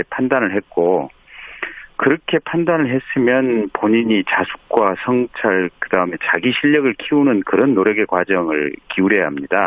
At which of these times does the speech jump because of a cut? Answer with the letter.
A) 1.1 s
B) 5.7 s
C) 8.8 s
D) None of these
A